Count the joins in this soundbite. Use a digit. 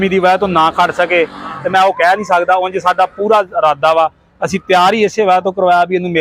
0